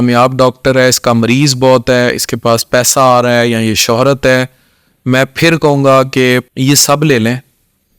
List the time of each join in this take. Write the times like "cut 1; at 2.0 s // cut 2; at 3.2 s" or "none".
cut 1; at 6.5 s